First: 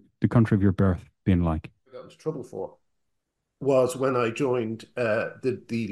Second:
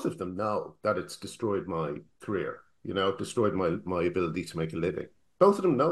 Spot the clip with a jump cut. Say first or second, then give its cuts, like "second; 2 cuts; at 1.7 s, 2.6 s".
first; 1 cut; at 2.1 s